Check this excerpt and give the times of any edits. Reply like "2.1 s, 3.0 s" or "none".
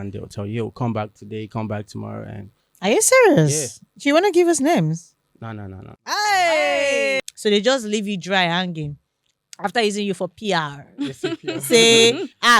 7.2 s